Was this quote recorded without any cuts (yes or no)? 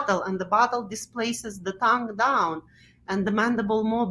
yes